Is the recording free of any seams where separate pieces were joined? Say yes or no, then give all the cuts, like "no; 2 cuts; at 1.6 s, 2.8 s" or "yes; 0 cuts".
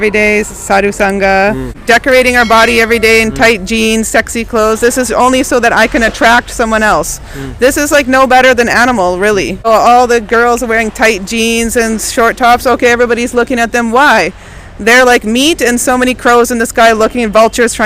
no; 2 cuts; at 1.7 s, 9.7 s